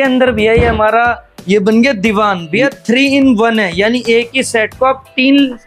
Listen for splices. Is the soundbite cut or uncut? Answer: uncut